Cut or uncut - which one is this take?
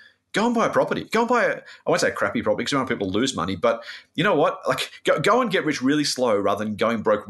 uncut